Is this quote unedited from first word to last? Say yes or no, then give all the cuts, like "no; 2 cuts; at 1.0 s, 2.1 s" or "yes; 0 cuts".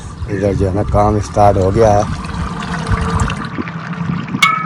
no; 1 cut; at 3.4 s